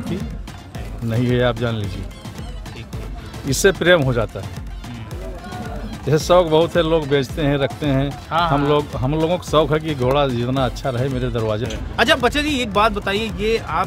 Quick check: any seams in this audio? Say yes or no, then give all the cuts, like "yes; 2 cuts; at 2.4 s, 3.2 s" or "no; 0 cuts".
yes; 1 cut; at 11.8 s